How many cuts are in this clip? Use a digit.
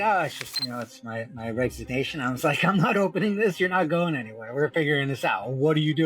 0